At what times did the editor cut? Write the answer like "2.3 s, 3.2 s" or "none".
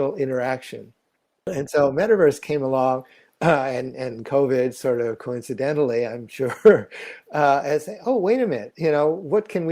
1.5 s